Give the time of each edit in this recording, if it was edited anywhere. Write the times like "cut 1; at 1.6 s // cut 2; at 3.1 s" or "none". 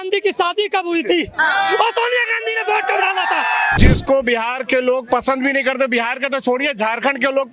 cut 1; at 3.8 s